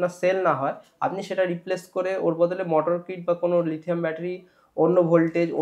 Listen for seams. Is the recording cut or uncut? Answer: uncut